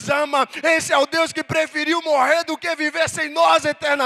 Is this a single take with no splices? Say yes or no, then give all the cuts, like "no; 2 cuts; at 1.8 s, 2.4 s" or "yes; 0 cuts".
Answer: yes; 0 cuts